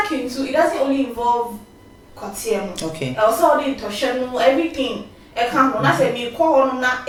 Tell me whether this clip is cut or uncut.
uncut